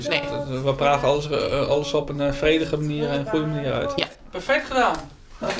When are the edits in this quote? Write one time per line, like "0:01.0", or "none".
0:04.2